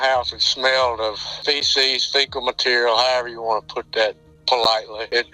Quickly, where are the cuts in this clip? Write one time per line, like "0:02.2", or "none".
none